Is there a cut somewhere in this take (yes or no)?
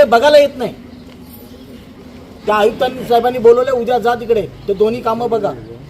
yes